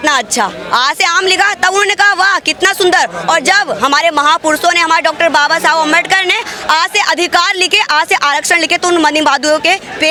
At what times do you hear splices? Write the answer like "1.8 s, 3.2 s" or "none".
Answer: none